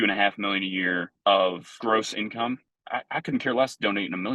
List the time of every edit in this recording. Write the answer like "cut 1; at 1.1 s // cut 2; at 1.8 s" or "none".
cut 1; at 1.1 s // cut 2; at 1.7 s // cut 3; at 2.7 s